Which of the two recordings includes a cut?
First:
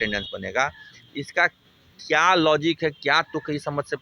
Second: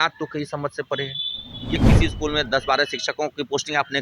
second; 1 cut; at 1.8 s

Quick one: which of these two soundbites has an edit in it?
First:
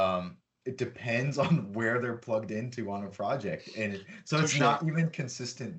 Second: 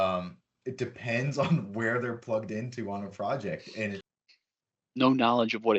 second; 1 cut; at 4.2 s

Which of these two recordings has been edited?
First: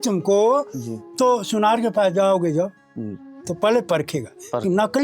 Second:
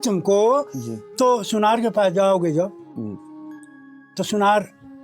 first; 1 cut; at 3.5 s

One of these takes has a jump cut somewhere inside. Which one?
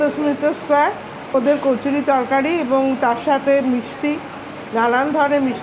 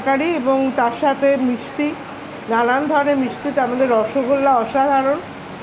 first; 1 cut; at 1.3 s

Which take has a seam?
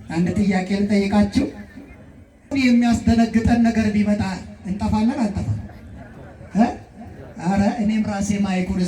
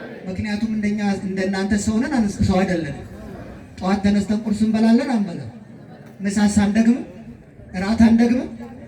first; 1 cut; at 2.5 s

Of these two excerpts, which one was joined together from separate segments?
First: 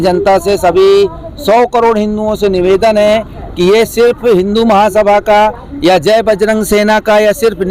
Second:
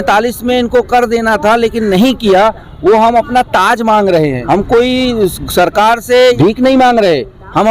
second; 2 cuts; at 4.4 s, 6.4 s

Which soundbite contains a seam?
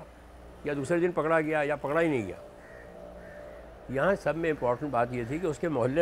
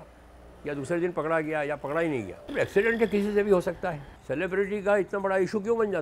second; 2 cuts; at 2.4 s, 4.1 s

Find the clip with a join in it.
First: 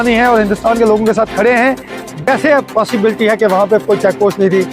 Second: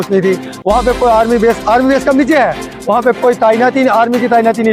first; 1 cut; at 2.2 s

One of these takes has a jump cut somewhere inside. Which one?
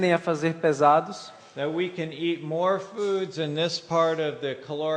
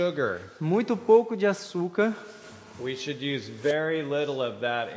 second; 1 cut; at 3.1 s

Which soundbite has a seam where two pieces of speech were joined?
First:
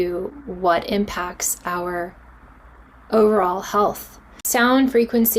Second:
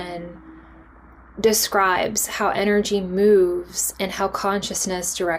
first; 1 cut; at 4.4 s

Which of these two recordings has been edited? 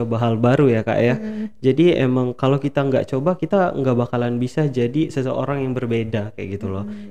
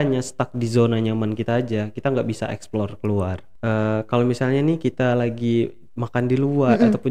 second; 1 cut; at 3.5 s

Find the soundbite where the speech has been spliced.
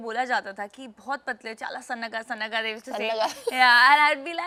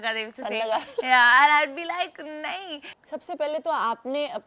second; 1 cut; at 2.9 s

